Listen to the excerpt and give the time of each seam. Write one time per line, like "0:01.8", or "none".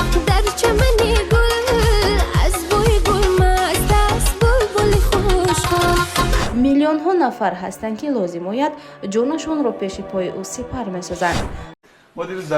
0:06.4

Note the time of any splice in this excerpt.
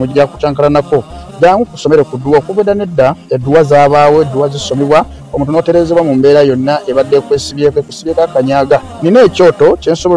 0:01.2

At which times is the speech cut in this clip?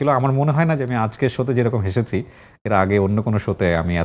none

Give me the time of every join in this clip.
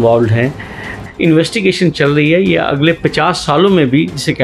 0:01.0

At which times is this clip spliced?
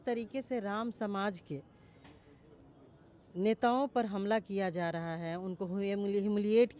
none

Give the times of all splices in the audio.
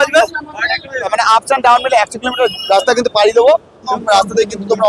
0:01.1
0:03.9

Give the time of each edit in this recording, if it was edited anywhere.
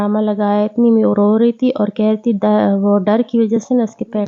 none

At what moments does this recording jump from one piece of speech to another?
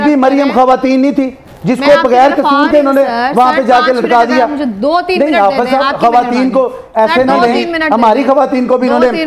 none

